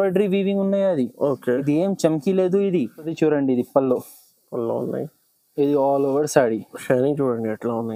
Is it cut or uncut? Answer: cut